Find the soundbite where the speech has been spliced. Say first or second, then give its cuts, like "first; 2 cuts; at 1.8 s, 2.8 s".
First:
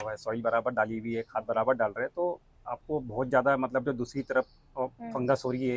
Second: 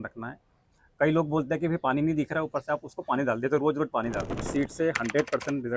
second; 1 cut; at 4.5 s